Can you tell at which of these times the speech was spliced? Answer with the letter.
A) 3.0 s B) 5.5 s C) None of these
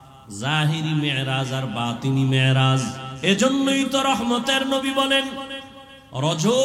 A